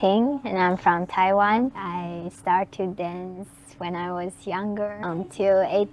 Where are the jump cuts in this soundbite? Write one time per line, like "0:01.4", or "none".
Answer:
0:01.8
0:05.0